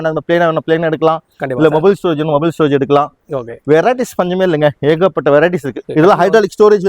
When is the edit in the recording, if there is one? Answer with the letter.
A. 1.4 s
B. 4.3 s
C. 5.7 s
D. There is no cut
C